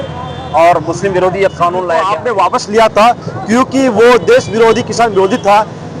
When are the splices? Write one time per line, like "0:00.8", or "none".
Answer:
0:02.1